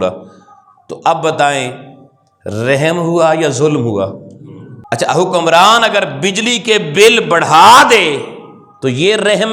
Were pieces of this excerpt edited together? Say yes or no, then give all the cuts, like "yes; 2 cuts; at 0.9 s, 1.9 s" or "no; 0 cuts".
no; 0 cuts